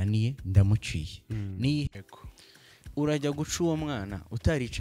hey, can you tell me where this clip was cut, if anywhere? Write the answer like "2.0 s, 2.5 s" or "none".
none

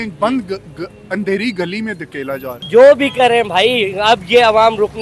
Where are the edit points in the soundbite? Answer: 2.5 s

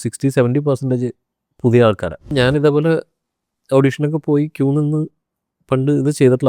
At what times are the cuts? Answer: 2.3 s

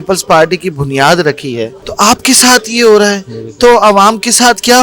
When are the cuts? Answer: 1.8 s

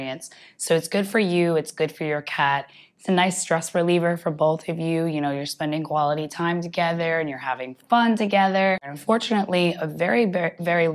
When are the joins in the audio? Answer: 8.9 s

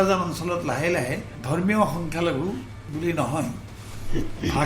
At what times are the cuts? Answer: 1.3 s, 2.8 s

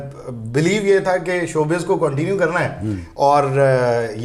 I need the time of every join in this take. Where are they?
none

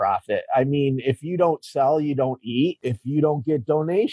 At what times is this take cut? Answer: 2.9 s

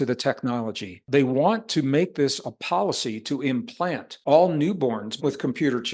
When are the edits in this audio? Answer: 1.0 s, 4.1 s, 5.2 s

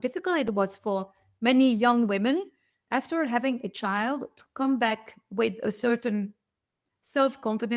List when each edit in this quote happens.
none

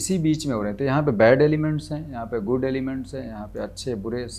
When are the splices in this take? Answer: none

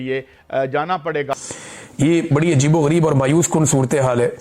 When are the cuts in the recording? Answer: 1.3 s

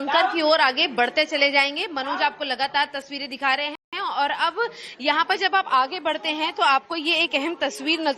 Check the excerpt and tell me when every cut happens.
none

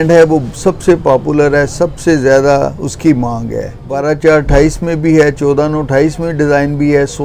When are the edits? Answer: 3.9 s

